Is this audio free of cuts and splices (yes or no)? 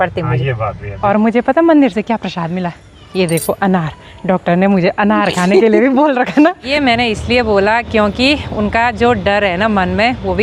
no